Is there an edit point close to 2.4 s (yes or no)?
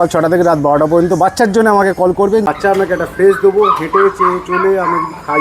yes